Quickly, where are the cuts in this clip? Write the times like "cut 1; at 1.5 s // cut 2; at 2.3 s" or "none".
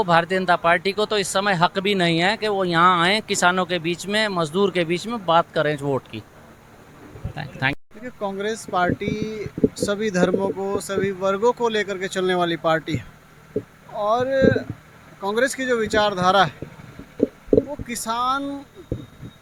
none